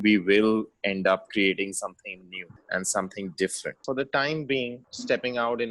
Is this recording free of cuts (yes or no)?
no